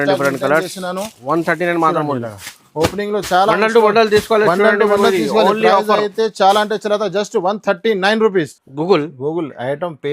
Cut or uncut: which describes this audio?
cut